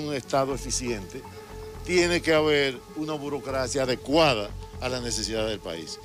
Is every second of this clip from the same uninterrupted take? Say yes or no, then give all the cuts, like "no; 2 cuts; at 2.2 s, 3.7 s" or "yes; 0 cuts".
yes; 0 cuts